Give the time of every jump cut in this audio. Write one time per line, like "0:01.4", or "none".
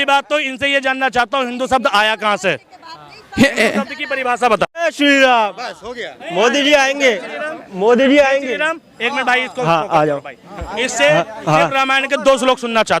0:04.9